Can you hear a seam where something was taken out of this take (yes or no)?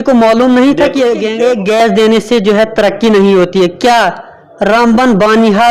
yes